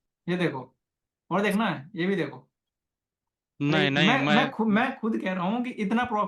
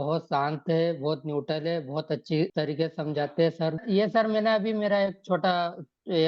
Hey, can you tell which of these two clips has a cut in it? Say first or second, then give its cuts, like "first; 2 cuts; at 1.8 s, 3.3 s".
second; 2 cuts; at 2.5 s, 3.8 s